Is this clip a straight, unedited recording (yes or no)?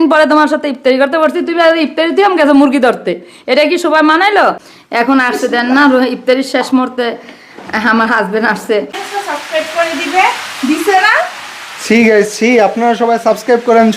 no